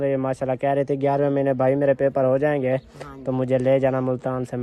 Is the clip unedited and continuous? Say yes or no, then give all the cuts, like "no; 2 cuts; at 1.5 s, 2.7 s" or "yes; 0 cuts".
yes; 0 cuts